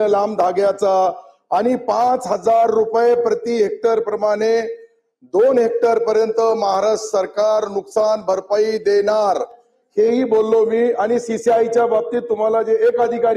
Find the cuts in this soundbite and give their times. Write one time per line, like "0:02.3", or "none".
none